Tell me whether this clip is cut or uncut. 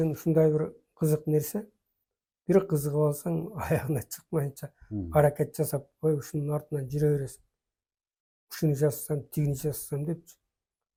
uncut